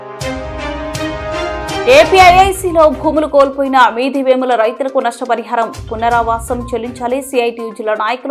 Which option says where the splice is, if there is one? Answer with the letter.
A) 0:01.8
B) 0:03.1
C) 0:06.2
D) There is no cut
D